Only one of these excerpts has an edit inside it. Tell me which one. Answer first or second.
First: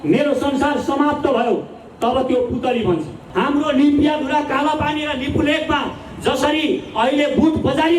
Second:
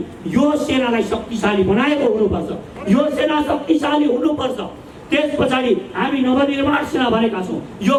first